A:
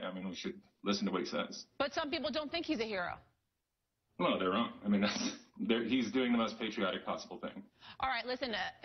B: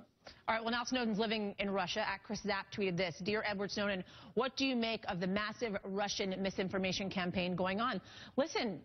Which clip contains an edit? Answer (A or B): A